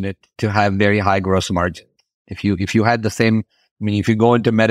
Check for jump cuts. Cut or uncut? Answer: uncut